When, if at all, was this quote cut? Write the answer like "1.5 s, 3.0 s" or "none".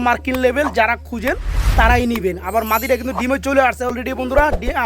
3.9 s